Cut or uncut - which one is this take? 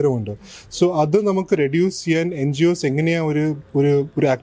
uncut